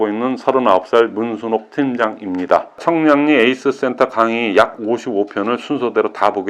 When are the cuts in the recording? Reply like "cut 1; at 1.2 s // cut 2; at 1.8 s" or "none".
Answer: cut 1; at 2.7 s